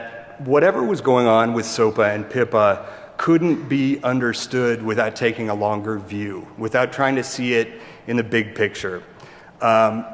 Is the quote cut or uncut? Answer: uncut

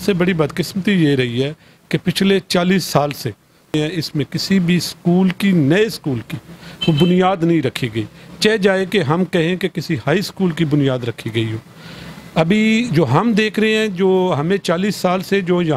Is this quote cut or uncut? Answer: uncut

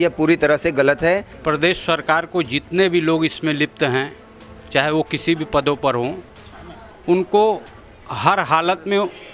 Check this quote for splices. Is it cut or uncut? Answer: cut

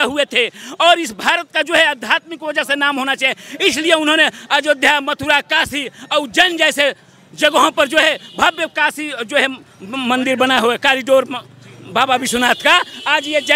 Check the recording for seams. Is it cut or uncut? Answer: uncut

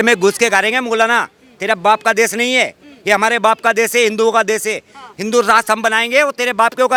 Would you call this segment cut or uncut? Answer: uncut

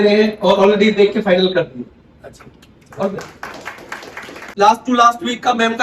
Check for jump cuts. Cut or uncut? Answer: cut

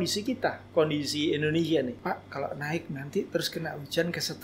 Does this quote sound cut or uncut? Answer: cut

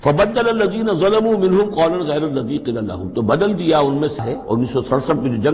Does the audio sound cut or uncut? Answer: cut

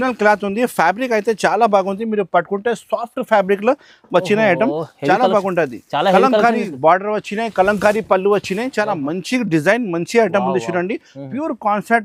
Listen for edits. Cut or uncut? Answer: uncut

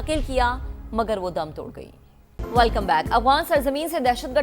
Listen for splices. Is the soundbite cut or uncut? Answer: cut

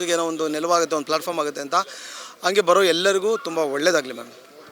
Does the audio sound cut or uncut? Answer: uncut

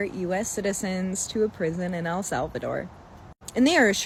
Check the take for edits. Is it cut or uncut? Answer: uncut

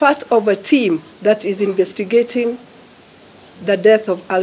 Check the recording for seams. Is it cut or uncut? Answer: cut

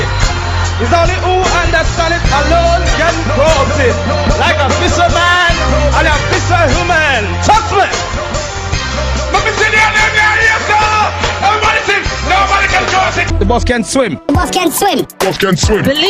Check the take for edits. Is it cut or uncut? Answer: cut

